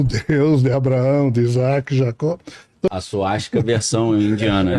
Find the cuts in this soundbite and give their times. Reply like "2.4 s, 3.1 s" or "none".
2.9 s